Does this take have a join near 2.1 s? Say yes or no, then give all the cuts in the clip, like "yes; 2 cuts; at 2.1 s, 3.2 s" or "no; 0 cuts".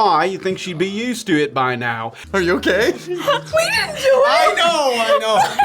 yes; 1 cut; at 2.1 s